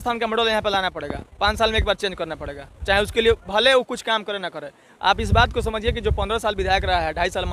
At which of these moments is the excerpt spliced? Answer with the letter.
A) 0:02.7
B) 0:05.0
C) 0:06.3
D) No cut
D